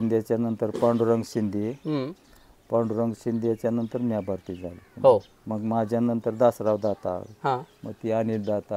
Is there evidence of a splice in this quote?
no; 0 cuts

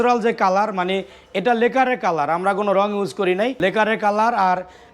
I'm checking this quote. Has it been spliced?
yes; 1 cut; at 3.6 s

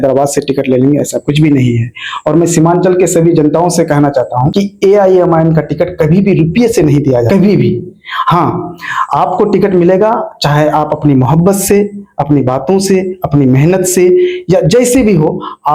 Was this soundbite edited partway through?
no; 0 cuts

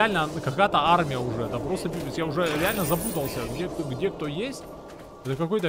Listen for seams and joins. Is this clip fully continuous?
yes; 0 cuts

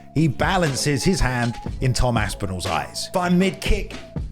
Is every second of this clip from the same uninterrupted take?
no; 1 cut; at 3.1 s

